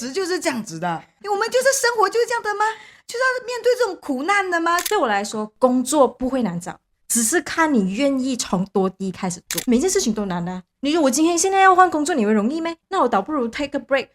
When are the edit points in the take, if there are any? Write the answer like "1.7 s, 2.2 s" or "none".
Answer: 1.1 s, 4.8 s, 9.5 s, 12.8 s